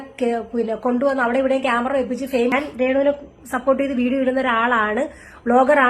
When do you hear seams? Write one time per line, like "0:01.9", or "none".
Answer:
0:02.5